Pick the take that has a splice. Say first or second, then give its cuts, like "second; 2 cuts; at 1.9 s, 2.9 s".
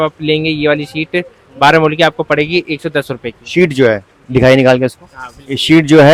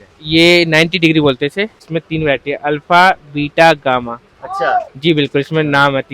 second; 1 cut; at 1.8 s